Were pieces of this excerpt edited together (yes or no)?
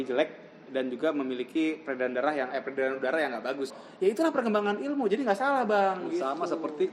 yes